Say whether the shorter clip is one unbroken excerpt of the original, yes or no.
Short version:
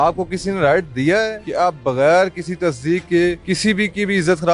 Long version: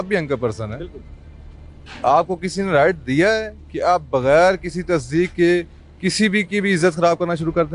no